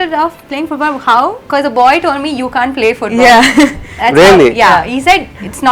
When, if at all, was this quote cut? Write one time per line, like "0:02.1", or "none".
0:01.4